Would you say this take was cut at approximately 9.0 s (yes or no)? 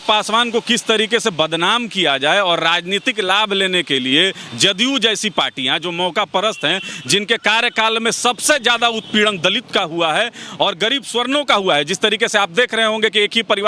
no